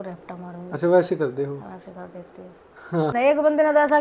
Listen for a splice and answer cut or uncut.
cut